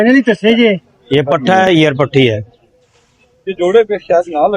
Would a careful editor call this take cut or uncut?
cut